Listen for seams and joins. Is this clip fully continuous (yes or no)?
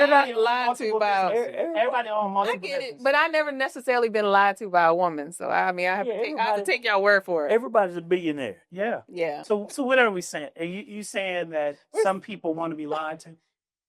no